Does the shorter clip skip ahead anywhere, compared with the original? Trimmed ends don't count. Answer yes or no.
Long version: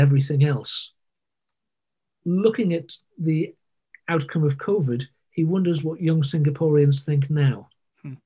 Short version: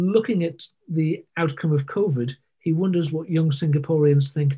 yes